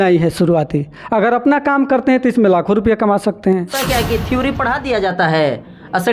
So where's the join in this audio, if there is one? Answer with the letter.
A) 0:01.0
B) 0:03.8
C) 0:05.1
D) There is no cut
B